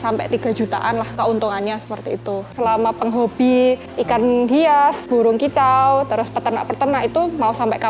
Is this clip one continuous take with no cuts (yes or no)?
no